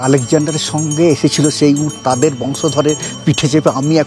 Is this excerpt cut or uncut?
uncut